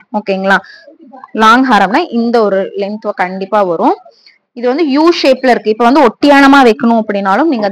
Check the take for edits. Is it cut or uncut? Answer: uncut